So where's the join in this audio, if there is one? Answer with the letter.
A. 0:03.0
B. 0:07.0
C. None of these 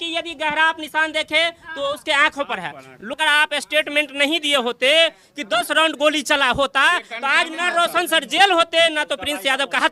A